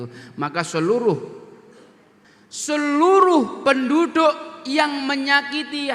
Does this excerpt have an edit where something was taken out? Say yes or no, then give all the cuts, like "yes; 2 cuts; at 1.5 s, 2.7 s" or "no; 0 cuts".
yes; 1 cut; at 2.3 s